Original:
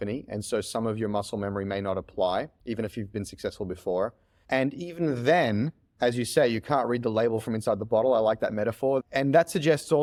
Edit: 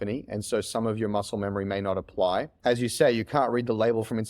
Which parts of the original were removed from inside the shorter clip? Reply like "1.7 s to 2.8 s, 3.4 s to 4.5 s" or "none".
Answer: 2.5 s to 5.9 s